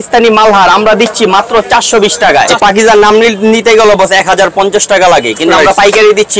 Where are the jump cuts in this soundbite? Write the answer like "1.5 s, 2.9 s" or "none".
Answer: 2.5 s

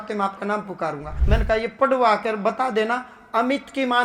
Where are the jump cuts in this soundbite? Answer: 1.1 s

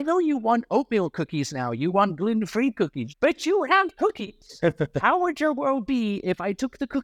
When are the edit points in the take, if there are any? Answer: none

